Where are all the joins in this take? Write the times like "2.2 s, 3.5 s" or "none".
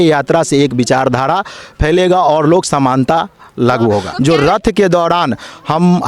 4.1 s